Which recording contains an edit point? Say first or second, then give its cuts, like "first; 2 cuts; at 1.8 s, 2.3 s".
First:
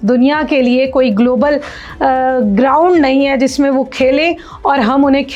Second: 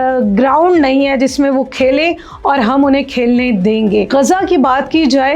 second; 1 cut; at 4.1 s